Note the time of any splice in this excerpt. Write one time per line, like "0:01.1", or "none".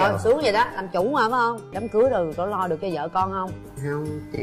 0:01.8